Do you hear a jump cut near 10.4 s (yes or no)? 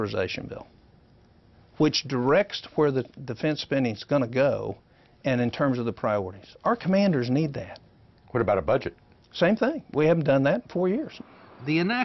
no